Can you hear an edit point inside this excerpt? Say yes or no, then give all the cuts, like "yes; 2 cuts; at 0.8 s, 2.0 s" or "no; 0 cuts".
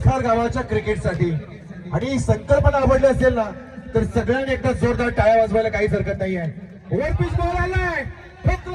no; 0 cuts